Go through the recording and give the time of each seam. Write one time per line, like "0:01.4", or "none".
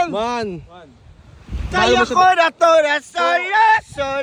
none